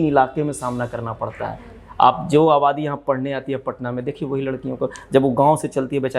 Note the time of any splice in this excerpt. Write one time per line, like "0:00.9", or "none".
none